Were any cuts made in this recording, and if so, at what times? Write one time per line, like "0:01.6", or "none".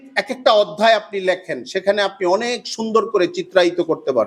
none